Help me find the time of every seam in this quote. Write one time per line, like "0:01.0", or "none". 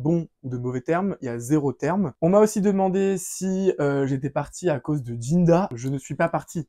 0:02.1
0:05.8